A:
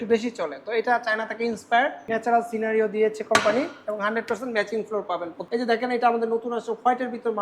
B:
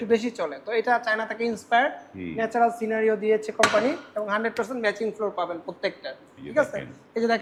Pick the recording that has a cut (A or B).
A